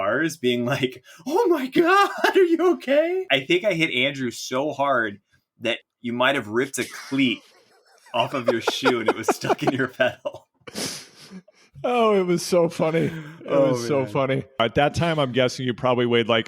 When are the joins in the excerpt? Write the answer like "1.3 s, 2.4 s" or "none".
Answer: 3.2 s, 5.8 s, 14.6 s